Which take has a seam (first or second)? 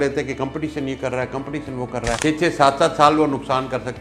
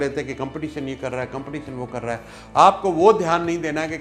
first